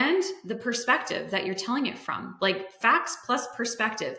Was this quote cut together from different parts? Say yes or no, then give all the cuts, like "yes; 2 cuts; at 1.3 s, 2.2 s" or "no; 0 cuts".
no; 0 cuts